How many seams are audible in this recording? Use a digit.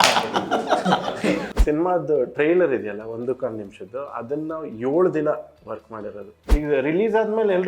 2